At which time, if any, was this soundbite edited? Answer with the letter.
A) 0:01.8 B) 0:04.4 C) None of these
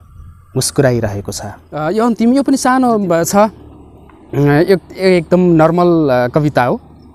A